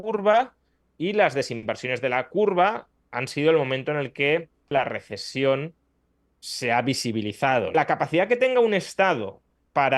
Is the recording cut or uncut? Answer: cut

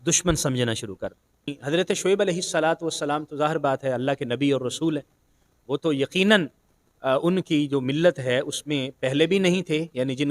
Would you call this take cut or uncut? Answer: cut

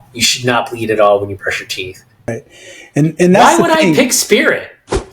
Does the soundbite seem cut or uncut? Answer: cut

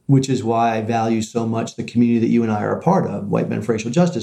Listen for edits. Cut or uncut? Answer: uncut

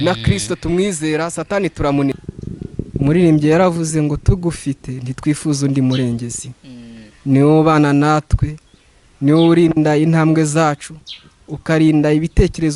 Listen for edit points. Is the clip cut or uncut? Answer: cut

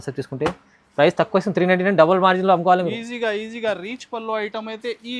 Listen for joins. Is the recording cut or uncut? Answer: uncut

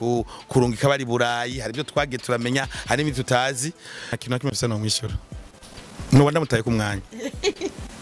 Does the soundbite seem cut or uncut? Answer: cut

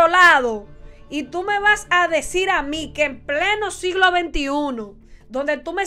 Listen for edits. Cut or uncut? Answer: uncut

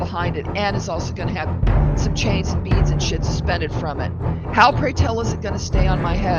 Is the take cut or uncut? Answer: cut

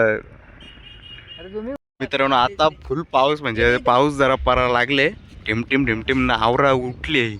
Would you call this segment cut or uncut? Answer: cut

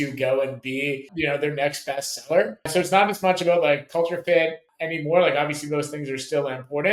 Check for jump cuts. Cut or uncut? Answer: cut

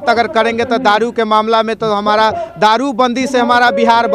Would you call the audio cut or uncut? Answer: uncut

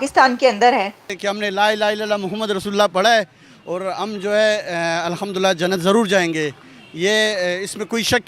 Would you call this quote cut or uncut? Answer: cut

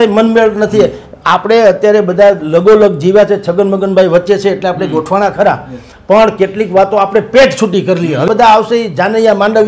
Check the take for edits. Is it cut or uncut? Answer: cut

